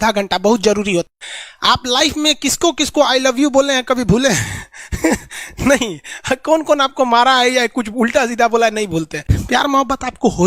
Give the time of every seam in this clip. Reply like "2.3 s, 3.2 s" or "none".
1.1 s, 9.3 s